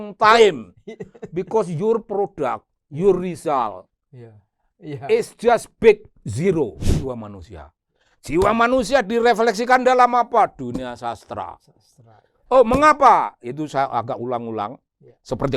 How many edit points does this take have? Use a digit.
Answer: 1